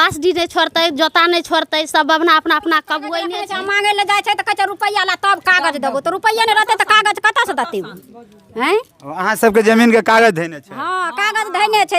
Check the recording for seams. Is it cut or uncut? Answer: cut